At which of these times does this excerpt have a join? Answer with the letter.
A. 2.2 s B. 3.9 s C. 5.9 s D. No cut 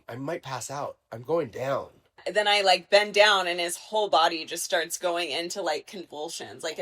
A